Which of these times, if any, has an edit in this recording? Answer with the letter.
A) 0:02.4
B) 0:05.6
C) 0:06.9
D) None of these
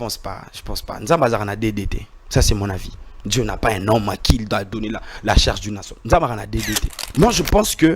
C